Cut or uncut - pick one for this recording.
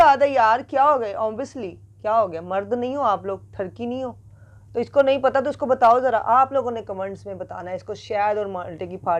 uncut